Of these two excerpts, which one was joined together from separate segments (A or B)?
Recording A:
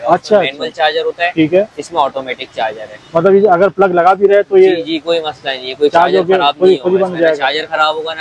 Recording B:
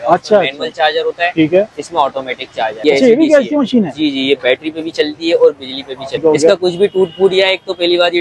B